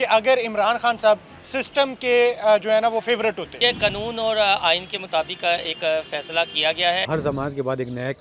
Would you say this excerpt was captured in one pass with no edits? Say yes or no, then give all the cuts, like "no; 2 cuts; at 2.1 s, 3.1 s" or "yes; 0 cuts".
no; 2 cuts; at 3.6 s, 7.1 s